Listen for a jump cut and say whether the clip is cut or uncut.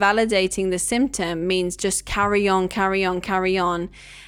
uncut